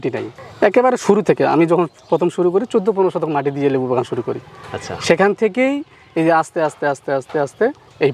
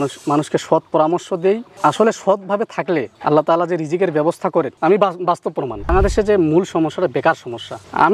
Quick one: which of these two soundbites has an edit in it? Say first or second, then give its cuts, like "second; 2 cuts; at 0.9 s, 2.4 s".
second; 2 cuts; at 4.8 s, 5.9 s